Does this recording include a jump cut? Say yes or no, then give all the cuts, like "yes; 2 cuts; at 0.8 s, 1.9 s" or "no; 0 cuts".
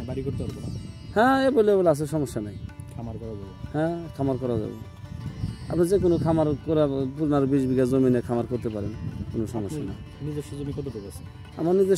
no; 0 cuts